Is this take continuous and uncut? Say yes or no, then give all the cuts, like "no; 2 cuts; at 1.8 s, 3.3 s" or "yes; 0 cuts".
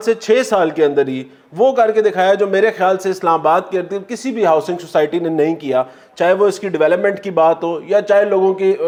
yes; 0 cuts